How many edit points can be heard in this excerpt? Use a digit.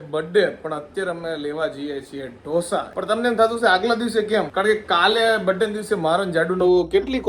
2